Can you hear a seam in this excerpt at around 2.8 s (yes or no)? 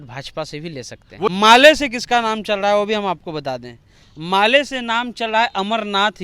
no